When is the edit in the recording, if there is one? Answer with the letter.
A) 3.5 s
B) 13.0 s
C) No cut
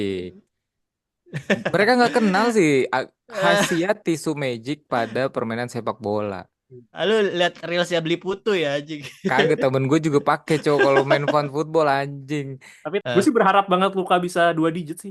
B